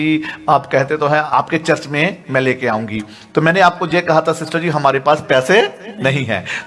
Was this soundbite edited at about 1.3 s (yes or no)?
yes